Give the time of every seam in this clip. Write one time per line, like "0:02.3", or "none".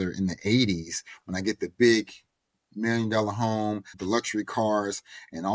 0:03.9